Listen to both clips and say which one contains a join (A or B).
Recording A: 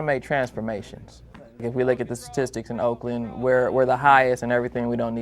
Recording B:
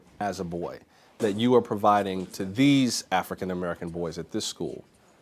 A